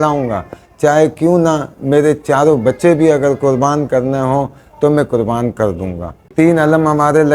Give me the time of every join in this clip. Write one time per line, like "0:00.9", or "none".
0:06.2